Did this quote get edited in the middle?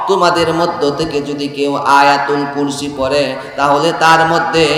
no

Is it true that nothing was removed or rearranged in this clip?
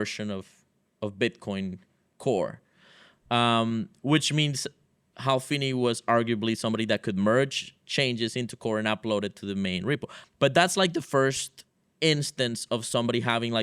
no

